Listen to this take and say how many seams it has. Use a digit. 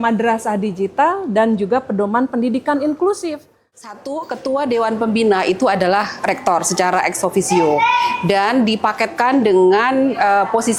1